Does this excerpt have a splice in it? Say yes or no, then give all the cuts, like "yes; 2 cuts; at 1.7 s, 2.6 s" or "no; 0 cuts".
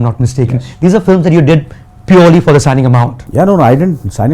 yes; 1 cut; at 3.2 s